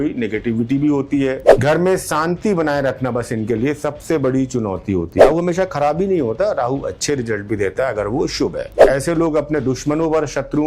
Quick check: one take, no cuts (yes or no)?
no